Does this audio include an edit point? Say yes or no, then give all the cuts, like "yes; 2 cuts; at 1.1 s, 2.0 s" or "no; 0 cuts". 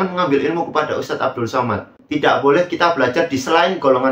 yes; 1 cut; at 1.9 s